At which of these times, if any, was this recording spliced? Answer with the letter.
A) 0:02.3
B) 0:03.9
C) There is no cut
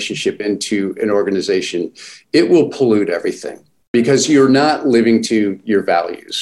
B